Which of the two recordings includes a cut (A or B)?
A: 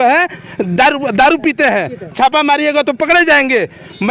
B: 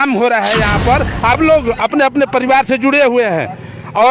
B